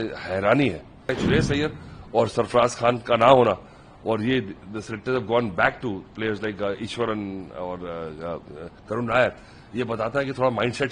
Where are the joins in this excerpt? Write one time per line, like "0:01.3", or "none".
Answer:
0:01.1